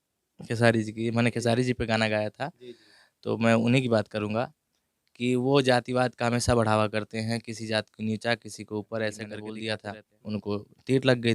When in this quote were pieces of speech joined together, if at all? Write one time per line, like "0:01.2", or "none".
0:09.4